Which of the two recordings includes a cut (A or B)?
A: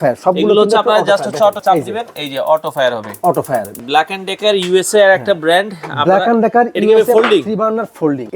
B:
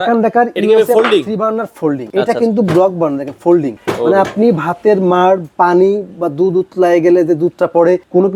A